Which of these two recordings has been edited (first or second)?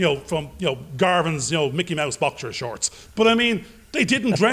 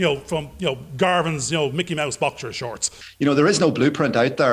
second